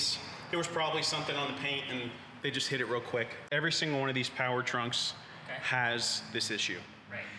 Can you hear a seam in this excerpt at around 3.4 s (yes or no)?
yes